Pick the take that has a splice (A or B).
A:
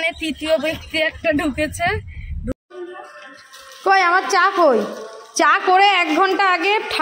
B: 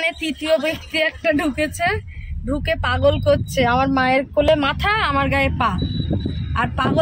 A